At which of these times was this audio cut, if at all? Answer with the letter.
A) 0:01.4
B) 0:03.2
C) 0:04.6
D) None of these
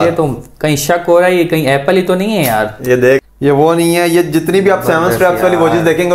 B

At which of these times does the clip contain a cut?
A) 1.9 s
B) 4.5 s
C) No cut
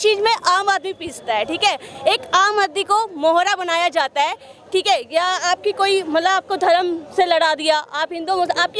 C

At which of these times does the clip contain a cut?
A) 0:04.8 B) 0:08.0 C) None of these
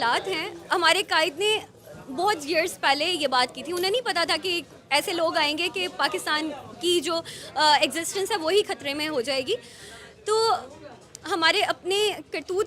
C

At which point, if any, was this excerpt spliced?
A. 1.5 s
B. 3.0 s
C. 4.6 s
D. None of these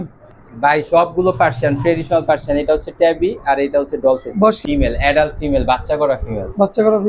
C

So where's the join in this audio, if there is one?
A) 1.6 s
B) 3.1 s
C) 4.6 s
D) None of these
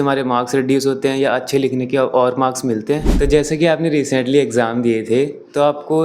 B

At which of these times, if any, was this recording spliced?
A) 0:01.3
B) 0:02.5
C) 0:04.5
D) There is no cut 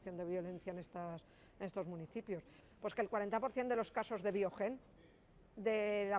B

